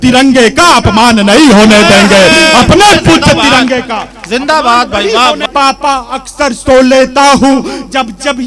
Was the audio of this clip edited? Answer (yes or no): yes